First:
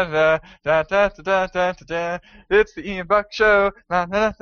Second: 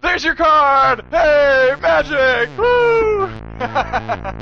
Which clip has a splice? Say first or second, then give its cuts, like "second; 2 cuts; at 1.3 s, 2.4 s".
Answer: second; 1 cut; at 3.4 s